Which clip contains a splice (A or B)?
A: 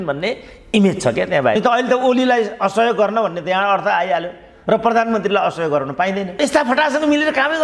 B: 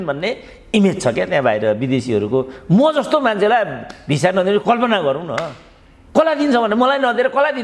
A